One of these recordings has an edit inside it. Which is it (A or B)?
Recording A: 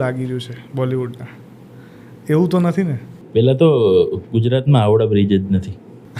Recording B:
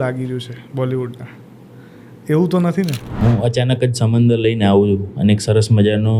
B